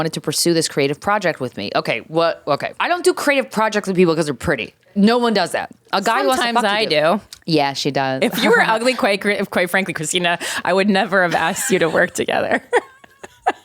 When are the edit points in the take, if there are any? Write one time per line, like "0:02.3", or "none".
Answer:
0:02.8
0:04.9
0:07.3